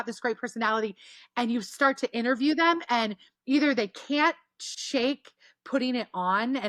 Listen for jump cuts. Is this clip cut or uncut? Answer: uncut